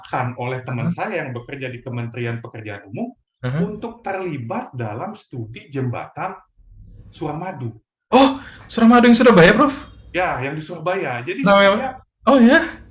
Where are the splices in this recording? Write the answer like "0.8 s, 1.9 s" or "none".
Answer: none